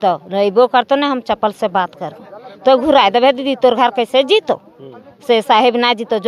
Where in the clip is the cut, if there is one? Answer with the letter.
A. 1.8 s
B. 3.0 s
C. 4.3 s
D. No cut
D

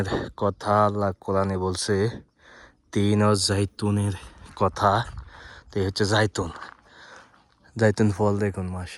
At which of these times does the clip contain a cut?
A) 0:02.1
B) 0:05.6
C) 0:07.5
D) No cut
D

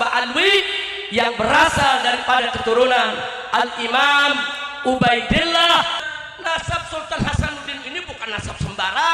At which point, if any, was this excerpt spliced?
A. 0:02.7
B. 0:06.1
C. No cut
B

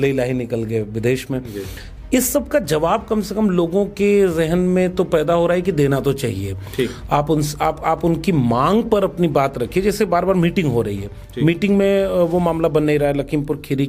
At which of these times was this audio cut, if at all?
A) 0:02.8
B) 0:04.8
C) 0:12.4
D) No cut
D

